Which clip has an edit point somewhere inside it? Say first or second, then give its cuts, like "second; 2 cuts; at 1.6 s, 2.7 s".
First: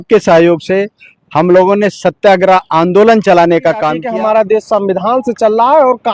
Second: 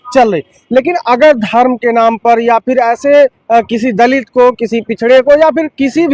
first; 1 cut; at 4.0 s